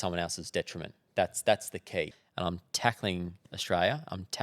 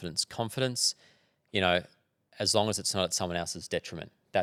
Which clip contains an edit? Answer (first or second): first